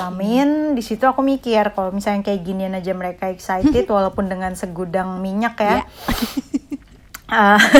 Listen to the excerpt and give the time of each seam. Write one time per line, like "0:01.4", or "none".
none